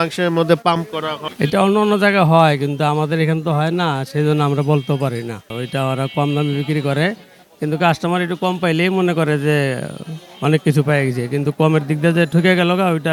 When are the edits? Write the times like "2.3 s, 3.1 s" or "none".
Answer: none